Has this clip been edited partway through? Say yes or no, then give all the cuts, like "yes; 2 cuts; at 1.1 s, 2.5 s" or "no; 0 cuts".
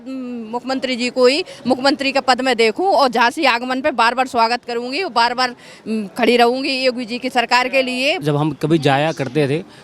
yes; 1 cut; at 8.2 s